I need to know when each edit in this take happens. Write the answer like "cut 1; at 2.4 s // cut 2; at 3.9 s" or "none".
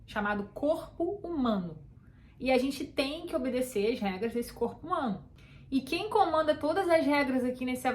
cut 1; at 5.3 s